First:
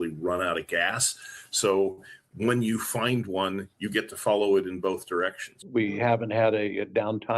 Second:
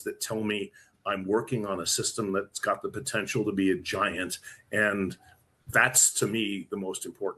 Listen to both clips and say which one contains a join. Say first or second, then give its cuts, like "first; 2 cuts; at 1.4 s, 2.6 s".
first; 1 cut; at 5.6 s